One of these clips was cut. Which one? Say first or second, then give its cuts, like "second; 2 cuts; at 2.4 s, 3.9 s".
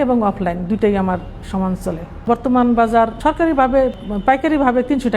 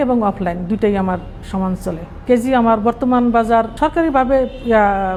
first; 2 cuts; at 2.2 s, 4.0 s